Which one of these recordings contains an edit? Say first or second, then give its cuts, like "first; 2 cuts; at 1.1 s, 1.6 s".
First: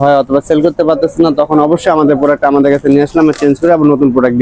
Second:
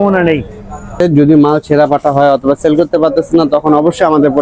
second; 1 cut; at 1.0 s